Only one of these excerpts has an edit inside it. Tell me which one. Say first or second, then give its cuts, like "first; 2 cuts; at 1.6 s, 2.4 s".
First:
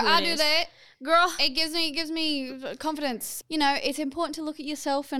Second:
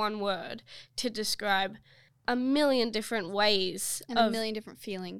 first; 1 cut; at 3.4 s